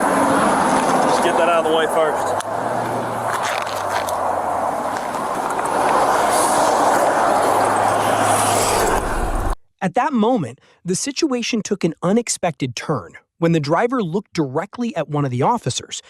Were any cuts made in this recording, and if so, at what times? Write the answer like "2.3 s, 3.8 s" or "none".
9.6 s